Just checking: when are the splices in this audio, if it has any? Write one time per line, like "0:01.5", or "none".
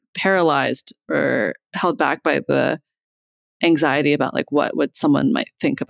none